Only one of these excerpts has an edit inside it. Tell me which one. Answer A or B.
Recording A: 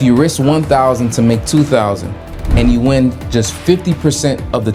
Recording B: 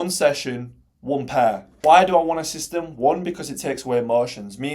B